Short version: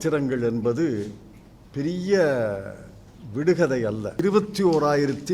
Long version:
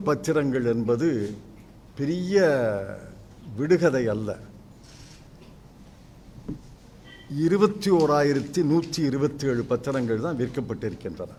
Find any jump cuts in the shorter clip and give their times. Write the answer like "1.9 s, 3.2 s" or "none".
4.2 s